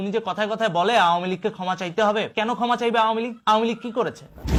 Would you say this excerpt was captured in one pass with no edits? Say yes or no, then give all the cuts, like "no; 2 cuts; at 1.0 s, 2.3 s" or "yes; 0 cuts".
yes; 0 cuts